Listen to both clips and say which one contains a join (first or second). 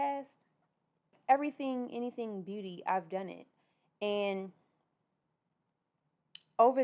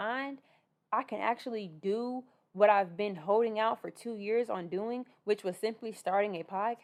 first